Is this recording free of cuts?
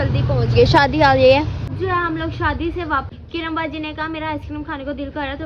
no; 2 cuts; at 1.7 s, 3.1 s

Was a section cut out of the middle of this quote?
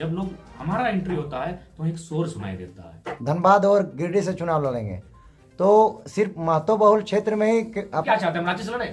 yes; 2 cuts; at 3.0 s, 8.0 s

